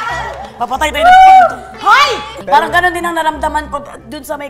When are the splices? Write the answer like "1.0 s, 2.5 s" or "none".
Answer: 2.3 s